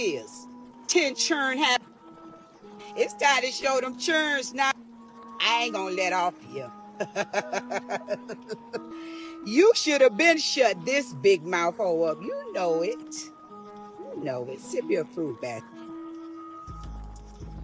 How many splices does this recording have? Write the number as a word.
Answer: zero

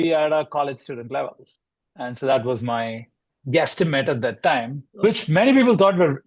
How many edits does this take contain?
one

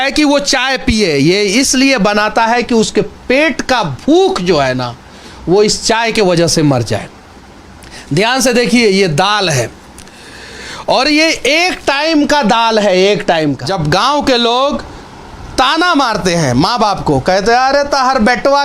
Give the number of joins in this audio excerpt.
one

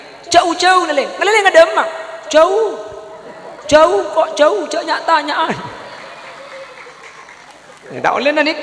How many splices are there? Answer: one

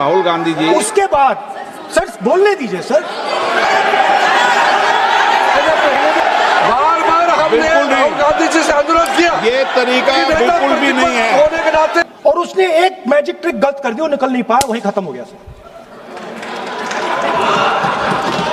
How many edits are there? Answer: three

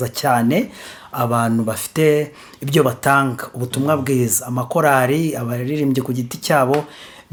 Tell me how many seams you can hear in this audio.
zero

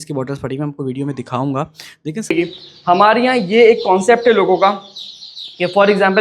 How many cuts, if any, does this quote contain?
one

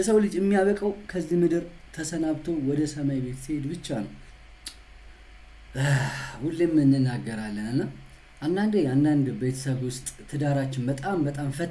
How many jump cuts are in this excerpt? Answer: one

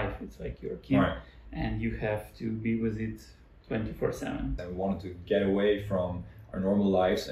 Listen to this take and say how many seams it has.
one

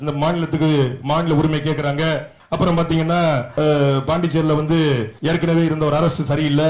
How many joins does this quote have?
three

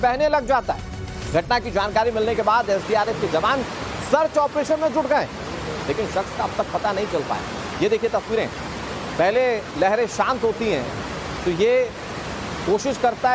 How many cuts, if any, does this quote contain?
one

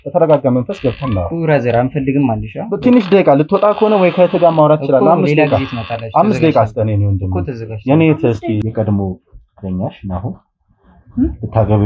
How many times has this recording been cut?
one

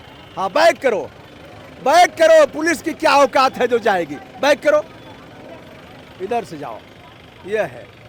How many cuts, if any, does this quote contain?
zero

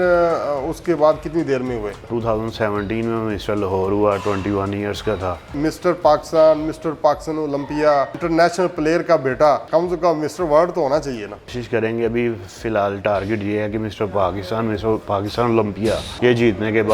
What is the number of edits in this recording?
six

